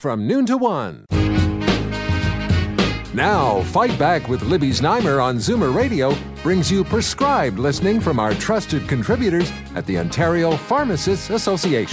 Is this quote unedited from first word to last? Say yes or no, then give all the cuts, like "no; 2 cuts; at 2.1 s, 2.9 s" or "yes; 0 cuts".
no; 1 cut; at 0.9 s